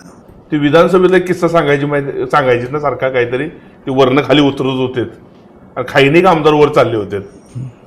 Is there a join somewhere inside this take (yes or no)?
no